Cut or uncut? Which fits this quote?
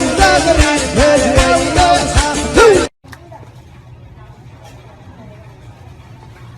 cut